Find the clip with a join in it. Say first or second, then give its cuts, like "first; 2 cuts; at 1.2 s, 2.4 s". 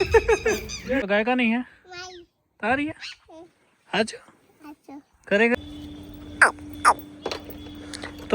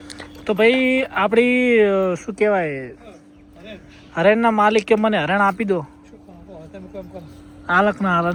first; 2 cuts; at 1.0 s, 5.5 s